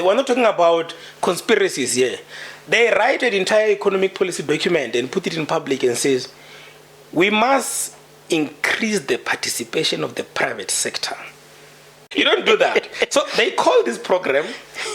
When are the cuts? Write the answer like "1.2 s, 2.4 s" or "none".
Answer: 12.1 s